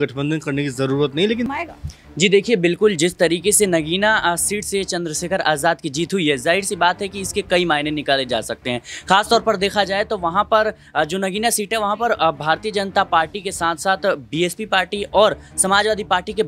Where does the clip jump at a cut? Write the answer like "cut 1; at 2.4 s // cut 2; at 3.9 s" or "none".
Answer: cut 1; at 1.5 s